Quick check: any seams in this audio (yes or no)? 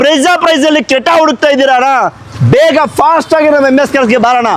no